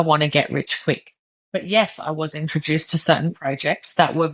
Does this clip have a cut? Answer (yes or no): no